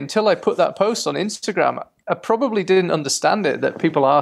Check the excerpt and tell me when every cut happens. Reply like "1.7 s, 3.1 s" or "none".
none